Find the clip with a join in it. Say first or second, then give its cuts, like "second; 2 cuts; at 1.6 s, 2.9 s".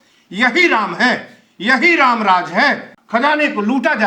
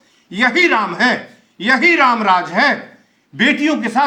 first; 1 cut; at 2.9 s